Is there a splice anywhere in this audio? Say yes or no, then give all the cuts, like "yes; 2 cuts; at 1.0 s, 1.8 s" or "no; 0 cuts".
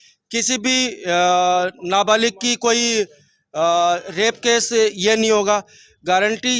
no; 0 cuts